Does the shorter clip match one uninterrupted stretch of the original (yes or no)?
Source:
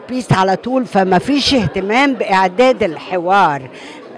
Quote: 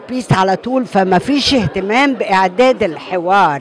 yes